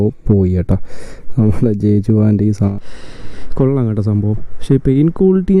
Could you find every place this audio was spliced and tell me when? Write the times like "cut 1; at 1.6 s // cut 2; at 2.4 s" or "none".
cut 1; at 2.6 s